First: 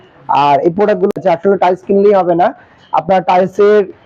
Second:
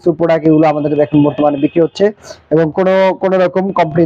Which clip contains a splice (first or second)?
first